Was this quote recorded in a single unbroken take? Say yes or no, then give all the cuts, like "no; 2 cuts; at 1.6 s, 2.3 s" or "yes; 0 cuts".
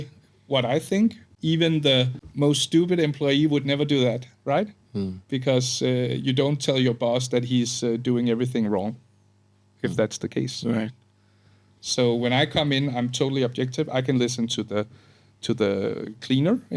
no; 2 cuts; at 1.3 s, 2.2 s